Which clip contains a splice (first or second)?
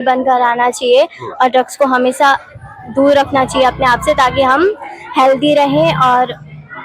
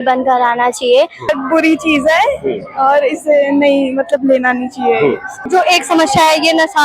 second